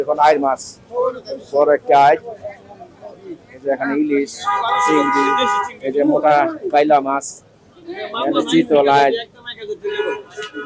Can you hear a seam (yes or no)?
no